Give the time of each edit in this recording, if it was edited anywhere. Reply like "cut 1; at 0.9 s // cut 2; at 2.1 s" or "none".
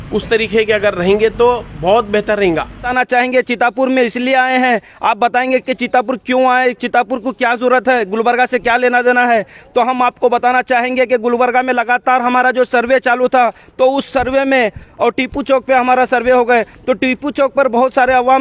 cut 1; at 2.9 s // cut 2; at 14.8 s